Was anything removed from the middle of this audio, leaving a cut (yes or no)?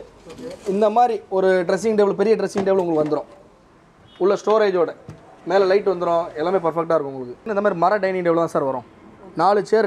yes